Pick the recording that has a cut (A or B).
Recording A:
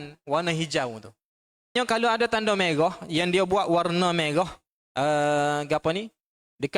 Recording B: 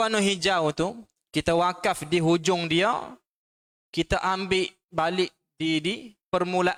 A